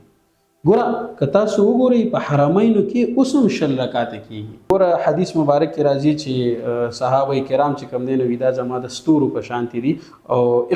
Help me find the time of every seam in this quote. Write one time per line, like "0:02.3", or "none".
0:04.7